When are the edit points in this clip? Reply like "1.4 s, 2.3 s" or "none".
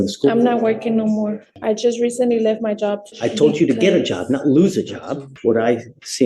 1.4 s, 3.1 s, 5.3 s